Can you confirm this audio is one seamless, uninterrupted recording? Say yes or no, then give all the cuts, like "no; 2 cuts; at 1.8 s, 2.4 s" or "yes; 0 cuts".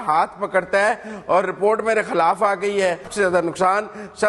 no; 1 cut; at 3.1 s